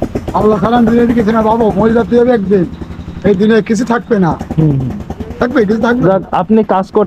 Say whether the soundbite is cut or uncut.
uncut